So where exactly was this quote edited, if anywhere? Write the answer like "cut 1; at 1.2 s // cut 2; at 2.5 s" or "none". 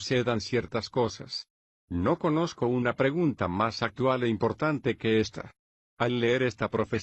cut 1; at 3.3 s